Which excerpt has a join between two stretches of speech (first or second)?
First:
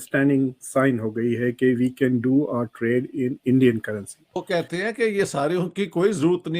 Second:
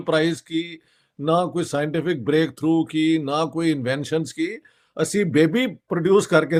first